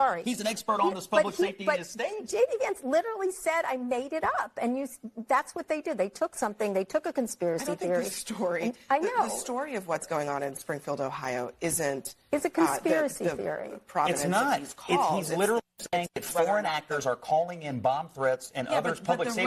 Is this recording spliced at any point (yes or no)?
yes